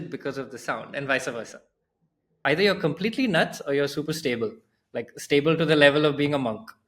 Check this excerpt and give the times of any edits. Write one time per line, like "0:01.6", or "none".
0:02.4